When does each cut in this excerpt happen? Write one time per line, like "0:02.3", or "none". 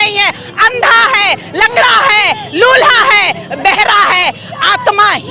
none